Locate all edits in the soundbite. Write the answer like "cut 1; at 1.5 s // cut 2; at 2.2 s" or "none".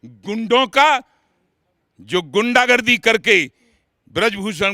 none